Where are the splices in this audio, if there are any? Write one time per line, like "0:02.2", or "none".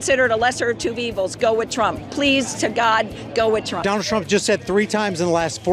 0:03.7